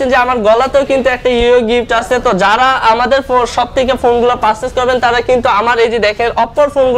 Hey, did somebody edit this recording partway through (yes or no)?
no